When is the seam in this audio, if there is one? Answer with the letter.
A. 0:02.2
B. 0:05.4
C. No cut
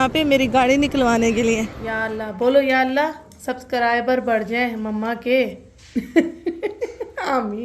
A